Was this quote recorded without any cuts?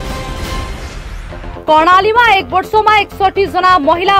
no; 1 cut; at 1.1 s

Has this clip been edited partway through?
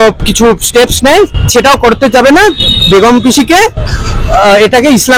no; 0 cuts

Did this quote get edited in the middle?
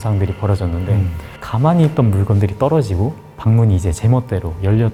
no; 0 cuts

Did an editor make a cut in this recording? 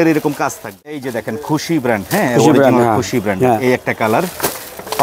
yes; 1 cut; at 1.0 s

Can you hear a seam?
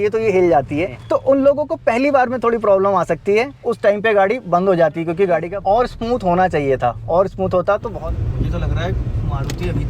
yes; 4 cuts; at 0.9 s, 3.6 s, 5.5 s, 7.9 s

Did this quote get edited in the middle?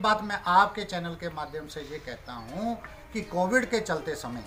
no; 0 cuts

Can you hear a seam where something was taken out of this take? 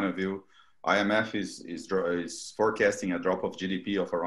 no; 0 cuts

